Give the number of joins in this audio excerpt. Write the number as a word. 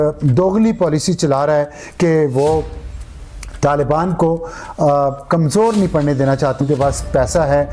one